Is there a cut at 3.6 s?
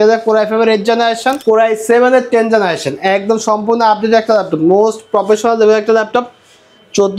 no; 1 cut; at 1.4 s

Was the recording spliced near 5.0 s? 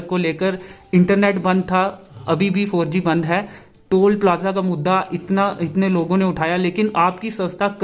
no; 0 cuts

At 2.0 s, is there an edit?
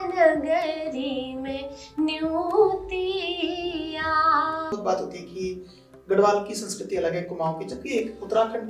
no; 1 cut; at 4.7 s

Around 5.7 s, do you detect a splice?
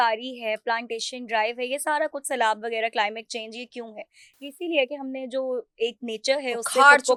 no; 0 cuts

